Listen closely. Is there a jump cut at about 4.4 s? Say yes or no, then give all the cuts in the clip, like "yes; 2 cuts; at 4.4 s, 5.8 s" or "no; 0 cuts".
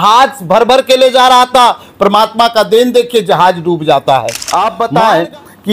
yes; 1 cut; at 4.4 s